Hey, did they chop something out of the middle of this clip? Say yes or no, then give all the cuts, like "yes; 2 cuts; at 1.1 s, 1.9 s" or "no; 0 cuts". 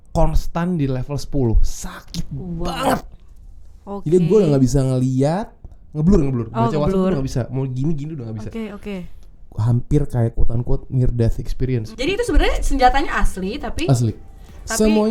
yes; 2 cuts; at 9.2 s, 11.9 s